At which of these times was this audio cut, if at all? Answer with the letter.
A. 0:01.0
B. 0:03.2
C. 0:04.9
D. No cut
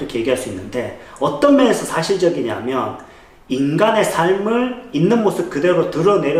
D